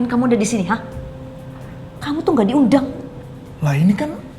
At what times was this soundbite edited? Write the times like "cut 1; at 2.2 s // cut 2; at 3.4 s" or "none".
none